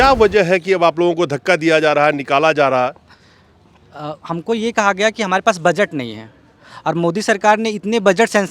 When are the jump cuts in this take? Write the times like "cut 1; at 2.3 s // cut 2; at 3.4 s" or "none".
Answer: none